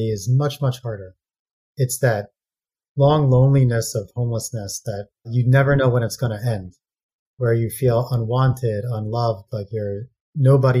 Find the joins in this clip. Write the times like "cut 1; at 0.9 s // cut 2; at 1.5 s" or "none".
cut 1; at 5.3 s